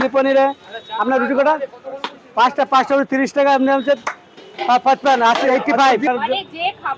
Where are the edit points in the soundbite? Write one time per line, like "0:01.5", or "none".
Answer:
0:06.1